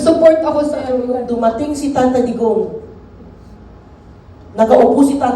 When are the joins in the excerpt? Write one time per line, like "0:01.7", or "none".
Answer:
0:01.2